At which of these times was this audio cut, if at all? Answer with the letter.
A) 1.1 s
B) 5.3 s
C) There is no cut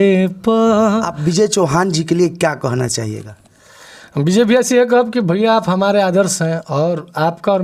A